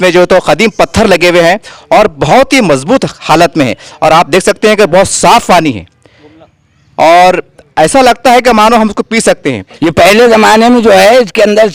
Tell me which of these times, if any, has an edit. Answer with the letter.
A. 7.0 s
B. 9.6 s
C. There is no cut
B